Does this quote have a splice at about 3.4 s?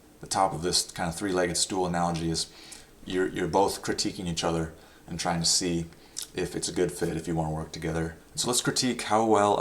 no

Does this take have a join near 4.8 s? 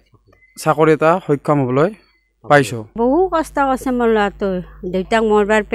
no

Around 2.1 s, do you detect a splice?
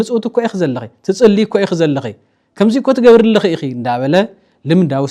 no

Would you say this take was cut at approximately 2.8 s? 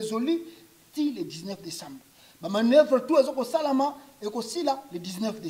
no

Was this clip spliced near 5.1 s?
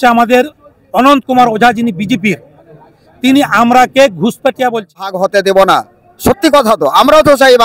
yes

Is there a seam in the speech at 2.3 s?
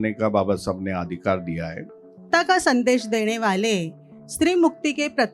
yes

